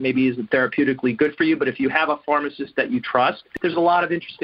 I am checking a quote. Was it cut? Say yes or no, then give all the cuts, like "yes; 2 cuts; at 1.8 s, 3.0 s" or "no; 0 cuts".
yes; 1 cut; at 3.5 s